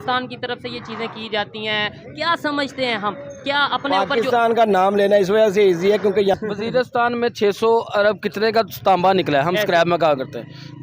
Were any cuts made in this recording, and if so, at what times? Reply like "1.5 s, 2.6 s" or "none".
6.3 s